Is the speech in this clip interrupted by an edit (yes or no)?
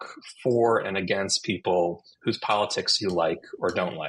no